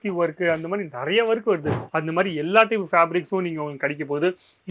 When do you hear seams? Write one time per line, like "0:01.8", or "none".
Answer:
0:01.8

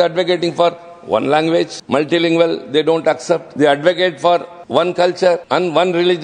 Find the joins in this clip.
0:01.8
0:03.5
0:04.6
0:05.4

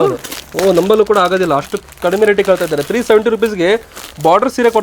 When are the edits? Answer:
none

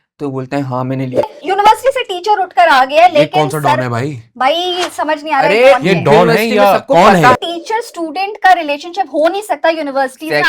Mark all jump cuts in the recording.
0:01.3
0:07.4

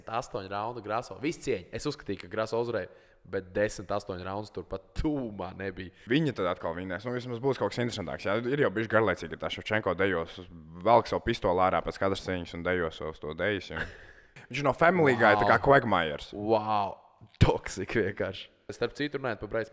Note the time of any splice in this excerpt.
0:05.9
0:14.3
0:18.7

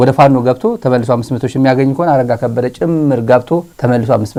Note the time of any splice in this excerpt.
none

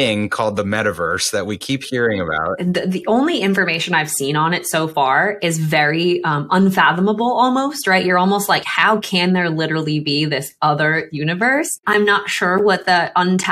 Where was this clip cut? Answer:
0:02.3
0:11.8

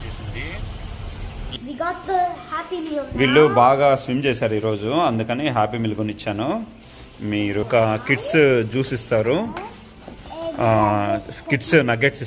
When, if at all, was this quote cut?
0:01.5
0:07.6

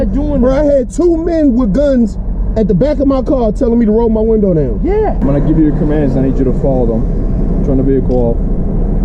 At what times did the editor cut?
0:05.2

